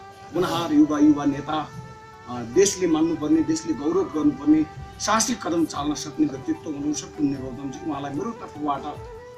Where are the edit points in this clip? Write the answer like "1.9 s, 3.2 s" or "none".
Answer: none